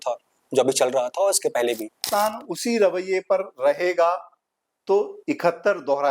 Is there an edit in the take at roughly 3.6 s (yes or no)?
no